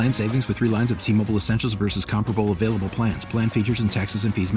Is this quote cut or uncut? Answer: uncut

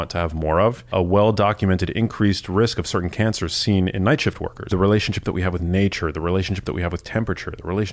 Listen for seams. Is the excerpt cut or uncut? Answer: cut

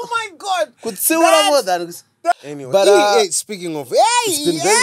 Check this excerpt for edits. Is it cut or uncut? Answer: cut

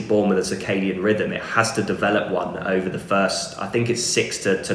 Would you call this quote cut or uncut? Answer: uncut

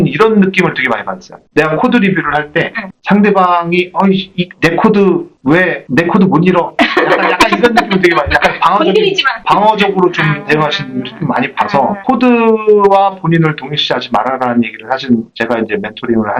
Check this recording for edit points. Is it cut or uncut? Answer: uncut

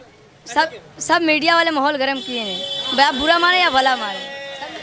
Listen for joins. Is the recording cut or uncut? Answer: uncut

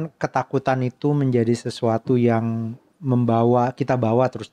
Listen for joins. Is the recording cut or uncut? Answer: uncut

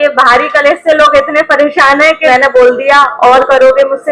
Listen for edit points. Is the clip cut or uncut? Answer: cut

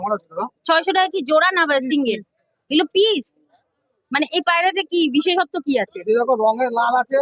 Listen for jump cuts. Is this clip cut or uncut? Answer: uncut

